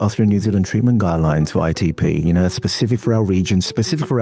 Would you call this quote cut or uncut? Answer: uncut